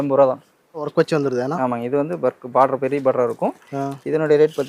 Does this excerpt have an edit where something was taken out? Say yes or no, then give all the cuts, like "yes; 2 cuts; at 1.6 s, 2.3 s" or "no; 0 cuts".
yes; 1 cut; at 0.9 s